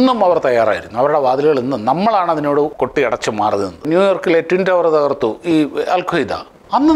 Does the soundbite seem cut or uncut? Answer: cut